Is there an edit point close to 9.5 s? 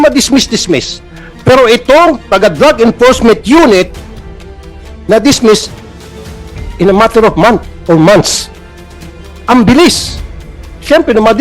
no; 1 cut; at 2.4 s

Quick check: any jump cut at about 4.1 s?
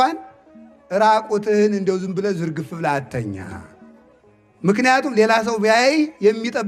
no; 0 cuts

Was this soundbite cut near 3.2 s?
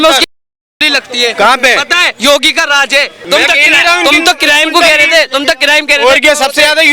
yes; 1 cut; at 3.2 s

